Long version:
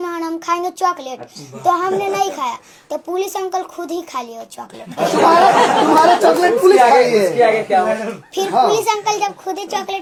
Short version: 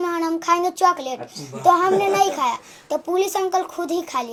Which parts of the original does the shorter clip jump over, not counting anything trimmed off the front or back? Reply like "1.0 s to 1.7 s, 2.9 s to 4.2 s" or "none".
none